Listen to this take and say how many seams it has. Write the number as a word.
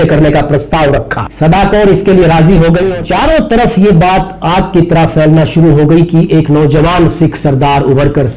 one